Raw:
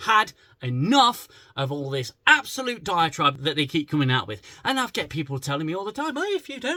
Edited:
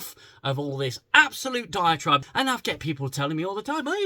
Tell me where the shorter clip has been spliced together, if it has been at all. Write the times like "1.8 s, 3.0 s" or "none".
2.2 s